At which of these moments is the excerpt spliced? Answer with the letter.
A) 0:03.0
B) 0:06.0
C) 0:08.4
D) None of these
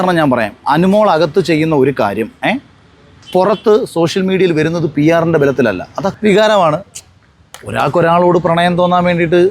B